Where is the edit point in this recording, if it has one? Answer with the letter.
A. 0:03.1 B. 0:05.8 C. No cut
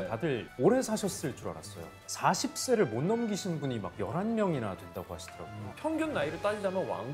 B